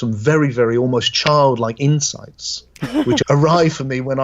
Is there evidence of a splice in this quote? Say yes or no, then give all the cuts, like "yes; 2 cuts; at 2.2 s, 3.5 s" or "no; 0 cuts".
yes; 1 cut; at 3.2 s